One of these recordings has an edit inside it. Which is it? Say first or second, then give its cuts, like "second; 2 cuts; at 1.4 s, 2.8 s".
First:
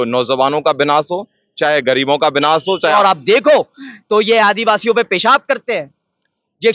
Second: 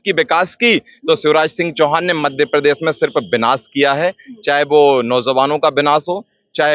first; 1 cut; at 2.9 s